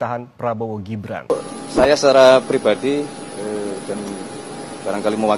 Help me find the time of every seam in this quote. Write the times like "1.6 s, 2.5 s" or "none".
1.3 s

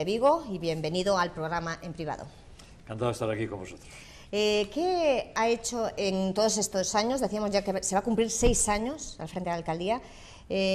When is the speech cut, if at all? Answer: 8.2 s

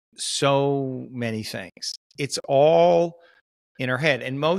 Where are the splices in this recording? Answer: 2.0 s

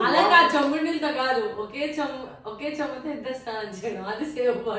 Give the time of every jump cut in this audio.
none

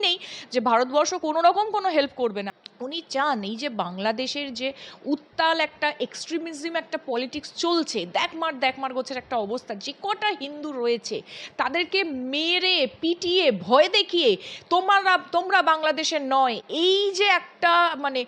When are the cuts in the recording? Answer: 2.4 s

